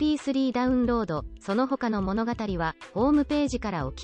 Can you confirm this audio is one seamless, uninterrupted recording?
yes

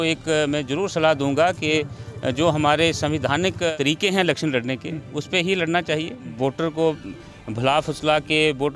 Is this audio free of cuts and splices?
no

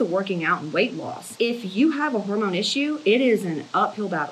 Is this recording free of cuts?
yes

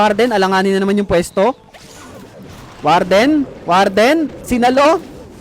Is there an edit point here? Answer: no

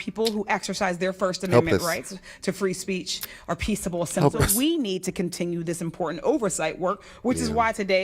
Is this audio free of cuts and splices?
no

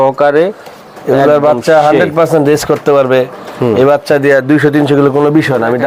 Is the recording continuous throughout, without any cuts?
yes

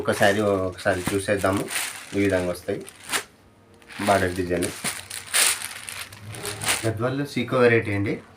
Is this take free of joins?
no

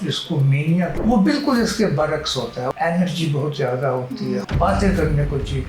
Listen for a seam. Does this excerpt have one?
yes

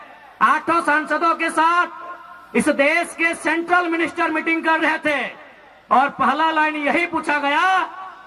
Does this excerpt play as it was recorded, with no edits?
yes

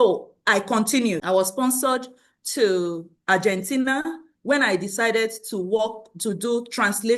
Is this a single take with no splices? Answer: no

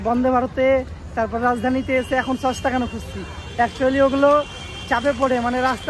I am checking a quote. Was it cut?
no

